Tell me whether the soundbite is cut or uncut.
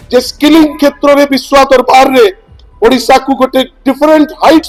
uncut